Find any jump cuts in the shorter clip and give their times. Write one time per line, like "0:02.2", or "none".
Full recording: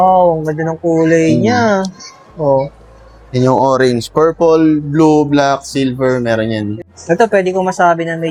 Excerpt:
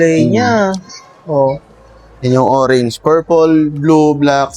none